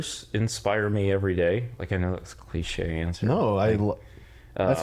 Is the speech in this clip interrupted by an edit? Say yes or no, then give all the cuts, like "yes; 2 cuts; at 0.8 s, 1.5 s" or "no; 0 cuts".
no; 0 cuts